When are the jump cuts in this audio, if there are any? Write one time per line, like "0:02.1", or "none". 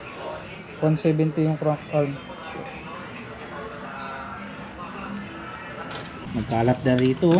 0:06.2